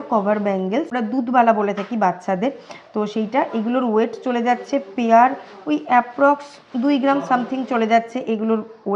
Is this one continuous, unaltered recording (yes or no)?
yes